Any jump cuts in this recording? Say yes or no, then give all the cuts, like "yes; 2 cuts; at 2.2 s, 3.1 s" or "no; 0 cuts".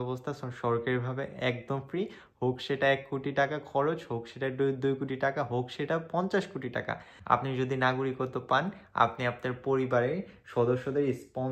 yes; 1 cut; at 7.1 s